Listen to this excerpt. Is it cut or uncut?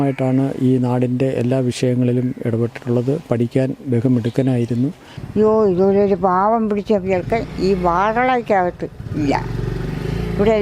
cut